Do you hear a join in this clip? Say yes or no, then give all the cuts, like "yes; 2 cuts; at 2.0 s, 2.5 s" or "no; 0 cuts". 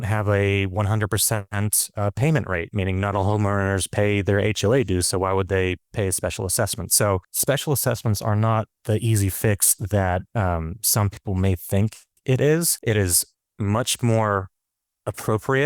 yes; 2 cuts; at 3.1 s, 7.2 s